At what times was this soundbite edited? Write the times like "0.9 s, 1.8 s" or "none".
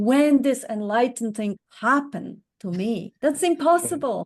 1.7 s, 3.1 s

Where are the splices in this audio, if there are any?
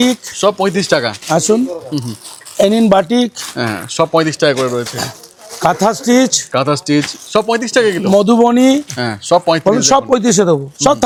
none

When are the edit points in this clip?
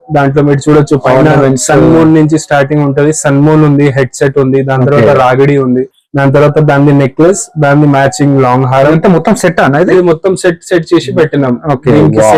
none

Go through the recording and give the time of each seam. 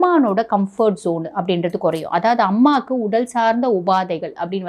none

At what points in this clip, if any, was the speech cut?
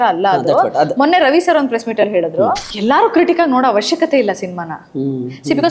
2.7 s

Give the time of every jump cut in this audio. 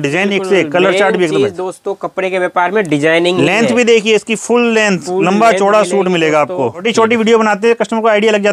6.8 s

